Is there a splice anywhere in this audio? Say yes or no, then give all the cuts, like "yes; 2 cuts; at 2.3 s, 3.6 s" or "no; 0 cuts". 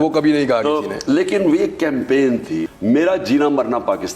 yes; 1 cut; at 2.7 s